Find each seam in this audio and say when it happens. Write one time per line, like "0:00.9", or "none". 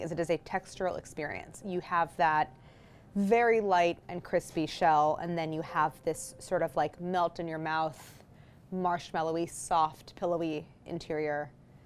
none